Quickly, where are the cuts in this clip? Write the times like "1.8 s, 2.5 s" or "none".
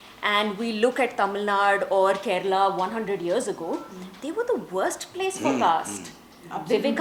none